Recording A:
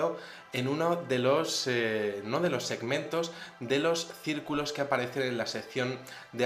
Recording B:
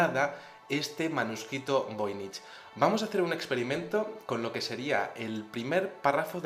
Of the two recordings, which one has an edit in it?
A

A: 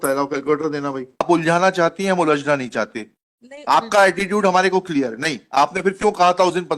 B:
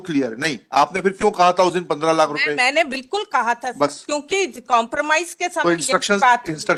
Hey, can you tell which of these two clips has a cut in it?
A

